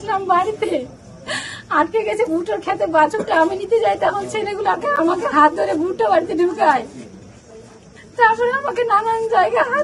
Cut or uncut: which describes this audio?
uncut